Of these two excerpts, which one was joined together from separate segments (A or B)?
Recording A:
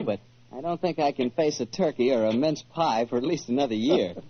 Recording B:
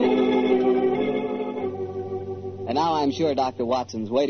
A